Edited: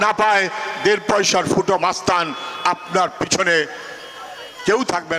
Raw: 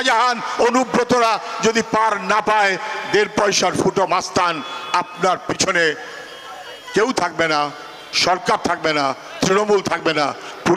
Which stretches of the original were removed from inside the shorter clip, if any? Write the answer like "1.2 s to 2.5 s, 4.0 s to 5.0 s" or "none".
none